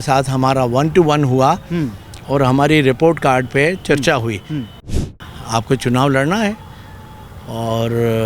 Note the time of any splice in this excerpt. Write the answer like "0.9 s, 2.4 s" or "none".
4.9 s